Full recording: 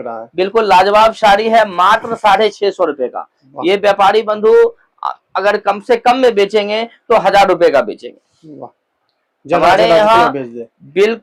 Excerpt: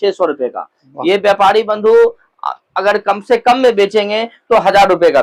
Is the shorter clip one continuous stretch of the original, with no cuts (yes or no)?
yes